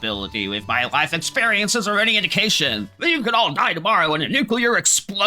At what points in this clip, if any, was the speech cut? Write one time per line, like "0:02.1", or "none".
0:02.9